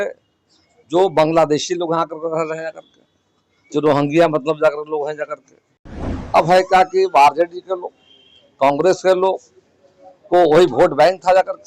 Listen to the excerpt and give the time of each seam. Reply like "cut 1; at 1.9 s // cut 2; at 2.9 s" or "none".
cut 1; at 6.1 s